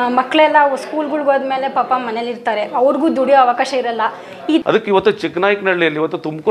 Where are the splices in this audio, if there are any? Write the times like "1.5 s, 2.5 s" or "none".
4.6 s